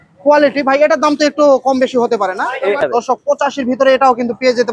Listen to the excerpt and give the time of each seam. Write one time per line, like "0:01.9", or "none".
0:02.8